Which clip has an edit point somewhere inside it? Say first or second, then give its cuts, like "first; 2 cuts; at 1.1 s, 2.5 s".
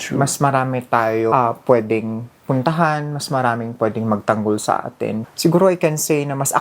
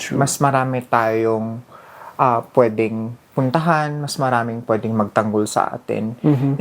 first; 2 cuts; at 1.3 s, 5.2 s